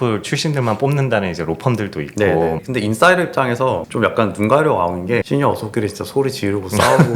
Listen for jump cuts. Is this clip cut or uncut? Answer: cut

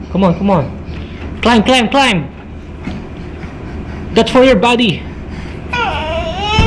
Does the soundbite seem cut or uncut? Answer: uncut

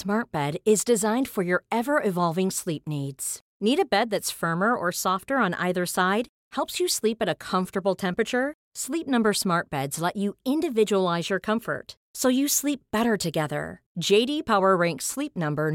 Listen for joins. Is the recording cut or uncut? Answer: uncut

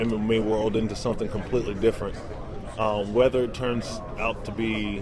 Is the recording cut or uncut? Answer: cut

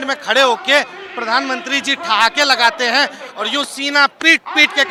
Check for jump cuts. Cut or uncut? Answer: uncut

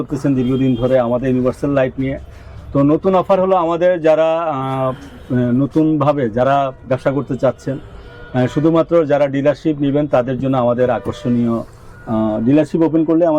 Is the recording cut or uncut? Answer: uncut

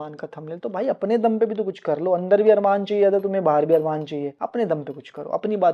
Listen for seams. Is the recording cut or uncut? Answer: uncut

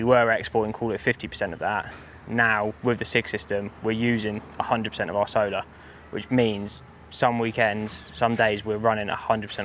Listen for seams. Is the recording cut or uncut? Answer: uncut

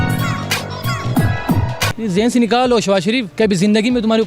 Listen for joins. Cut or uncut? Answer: cut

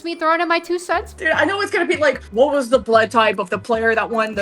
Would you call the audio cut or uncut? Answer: cut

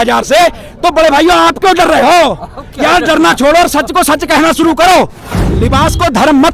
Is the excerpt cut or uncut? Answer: cut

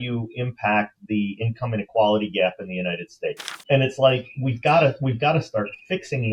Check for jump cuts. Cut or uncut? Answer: cut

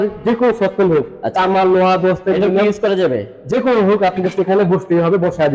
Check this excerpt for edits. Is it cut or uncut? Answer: uncut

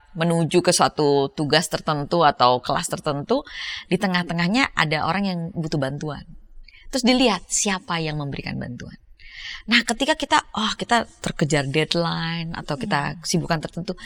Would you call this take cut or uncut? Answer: uncut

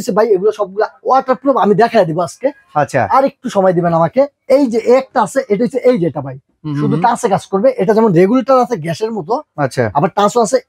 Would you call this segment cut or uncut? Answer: uncut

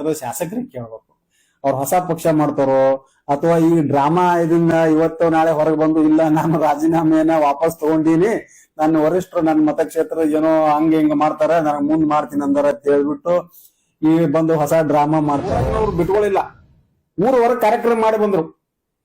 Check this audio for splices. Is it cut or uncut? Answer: cut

